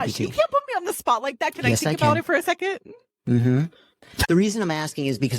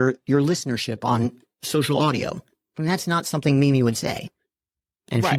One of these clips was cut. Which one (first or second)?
first